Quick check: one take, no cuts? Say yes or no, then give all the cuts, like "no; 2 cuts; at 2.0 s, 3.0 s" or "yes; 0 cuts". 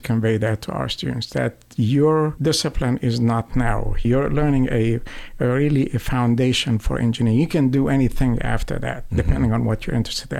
no; 2 cuts; at 2.4 s, 4.0 s